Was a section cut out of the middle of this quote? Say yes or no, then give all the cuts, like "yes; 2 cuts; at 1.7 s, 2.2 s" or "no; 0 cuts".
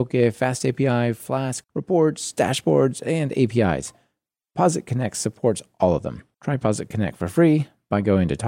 yes; 1 cut; at 1.7 s